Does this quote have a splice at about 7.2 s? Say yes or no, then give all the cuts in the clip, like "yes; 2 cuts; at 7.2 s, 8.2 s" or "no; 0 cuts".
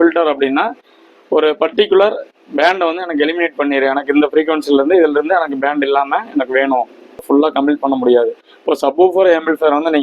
yes; 1 cut; at 7.2 s